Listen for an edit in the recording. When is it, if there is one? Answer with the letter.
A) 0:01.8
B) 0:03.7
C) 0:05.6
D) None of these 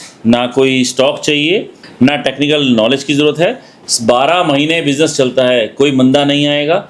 A